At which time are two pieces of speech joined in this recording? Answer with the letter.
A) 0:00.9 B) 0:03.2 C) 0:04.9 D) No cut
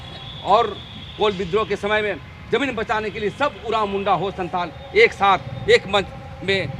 D